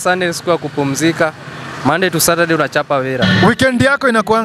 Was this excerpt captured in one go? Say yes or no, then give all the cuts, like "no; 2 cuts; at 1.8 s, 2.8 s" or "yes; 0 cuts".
no; 1 cut; at 3.2 s